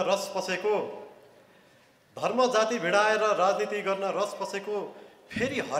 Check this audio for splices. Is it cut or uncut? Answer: uncut